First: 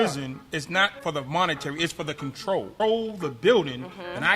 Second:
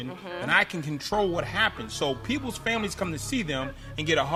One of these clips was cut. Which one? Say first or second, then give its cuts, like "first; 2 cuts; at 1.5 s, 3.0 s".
first; 2 cuts; at 0.9 s, 2.7 s